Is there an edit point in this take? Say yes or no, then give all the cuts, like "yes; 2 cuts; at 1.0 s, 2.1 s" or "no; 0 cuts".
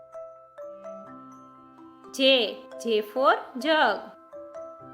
yes; 2 cuts; at 1.7 s, 4.1 s